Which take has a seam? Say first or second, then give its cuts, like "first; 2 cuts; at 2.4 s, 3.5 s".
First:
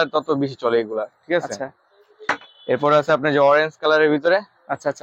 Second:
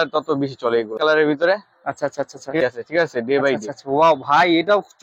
second; 2 cuts; at 0.9 s, 2.6 s